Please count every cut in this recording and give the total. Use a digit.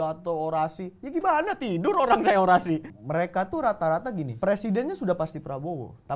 2